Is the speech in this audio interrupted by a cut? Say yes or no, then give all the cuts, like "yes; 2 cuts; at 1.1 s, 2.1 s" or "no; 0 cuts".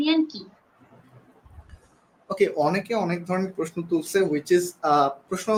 no; 0 cuts